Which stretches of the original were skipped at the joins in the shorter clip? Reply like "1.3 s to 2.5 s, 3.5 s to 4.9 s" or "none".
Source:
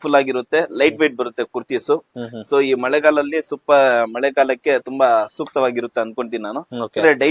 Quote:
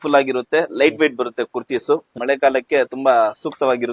2.2 s to 4.1 s